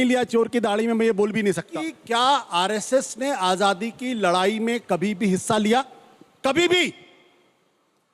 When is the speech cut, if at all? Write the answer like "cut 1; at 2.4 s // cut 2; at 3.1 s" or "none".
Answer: cut 1; at 1.9 s